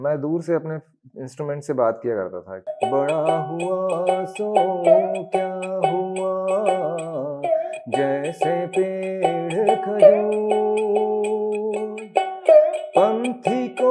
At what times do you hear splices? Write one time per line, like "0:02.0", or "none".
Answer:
0:02.7